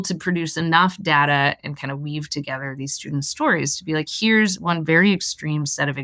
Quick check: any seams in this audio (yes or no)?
no